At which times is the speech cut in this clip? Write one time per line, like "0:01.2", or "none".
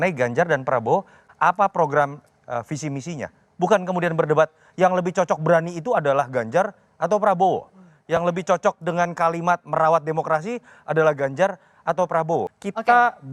0:01.2
0:12.5